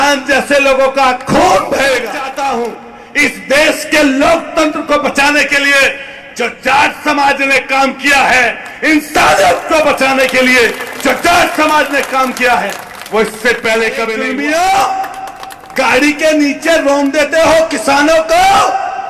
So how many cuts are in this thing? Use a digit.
2